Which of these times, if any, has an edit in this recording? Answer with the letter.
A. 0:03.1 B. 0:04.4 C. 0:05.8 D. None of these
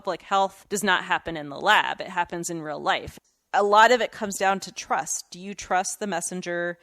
A